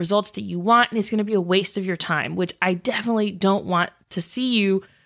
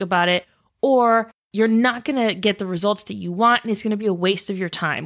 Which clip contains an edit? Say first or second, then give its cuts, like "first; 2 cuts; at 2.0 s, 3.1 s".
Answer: second; 1 cut; at 1.4 s